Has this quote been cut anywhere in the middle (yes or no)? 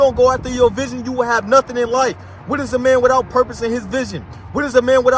no